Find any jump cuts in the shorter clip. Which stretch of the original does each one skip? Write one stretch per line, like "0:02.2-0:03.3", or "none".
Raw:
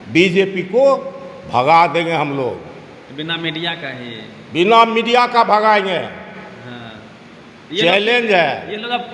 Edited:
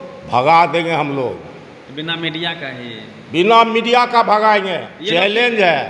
0:06.1-0:07.6